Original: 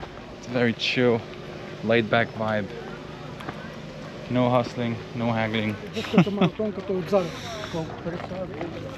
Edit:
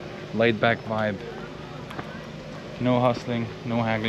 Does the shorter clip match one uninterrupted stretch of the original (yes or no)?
yes